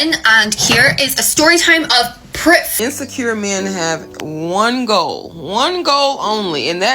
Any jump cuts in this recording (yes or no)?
yes